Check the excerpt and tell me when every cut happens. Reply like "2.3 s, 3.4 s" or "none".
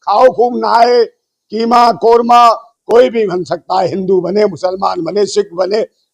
2.7 s

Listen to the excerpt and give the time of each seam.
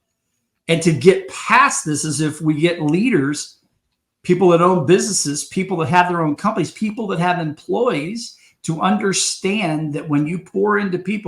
none

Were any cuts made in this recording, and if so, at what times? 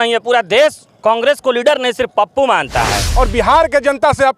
3.0 s

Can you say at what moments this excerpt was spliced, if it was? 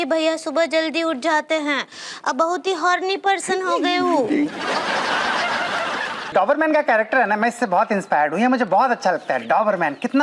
6.3 s

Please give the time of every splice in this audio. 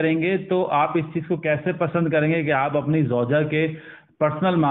none

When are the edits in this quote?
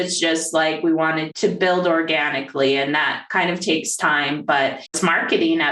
1.3 s, 5.0 s

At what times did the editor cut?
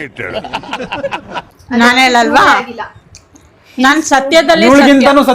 1.6 s

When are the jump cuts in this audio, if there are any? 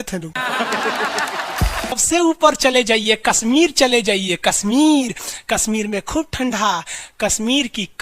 2.0 s

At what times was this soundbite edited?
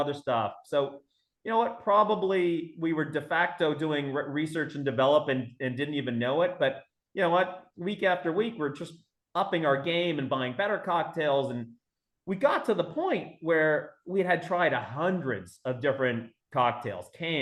none

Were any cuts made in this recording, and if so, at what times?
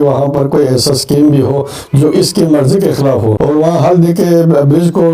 3.4 s

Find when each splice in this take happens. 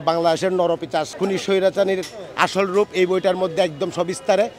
1.1 s

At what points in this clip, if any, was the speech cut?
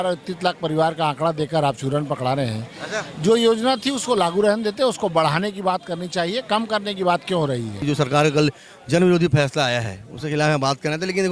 7.8 s

